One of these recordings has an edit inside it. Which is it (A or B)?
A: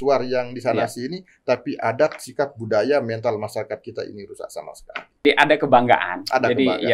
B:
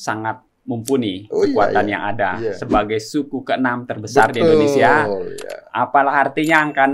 A